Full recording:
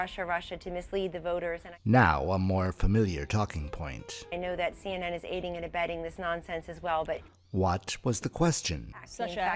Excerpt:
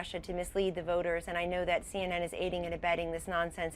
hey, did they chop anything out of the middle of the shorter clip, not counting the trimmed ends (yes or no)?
yes